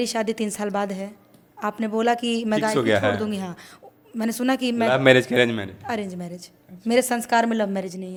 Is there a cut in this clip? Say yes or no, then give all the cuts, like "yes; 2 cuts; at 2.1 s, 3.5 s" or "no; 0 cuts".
no; 0 cuts